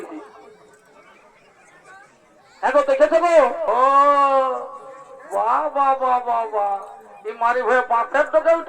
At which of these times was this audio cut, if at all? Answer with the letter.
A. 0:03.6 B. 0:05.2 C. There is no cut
A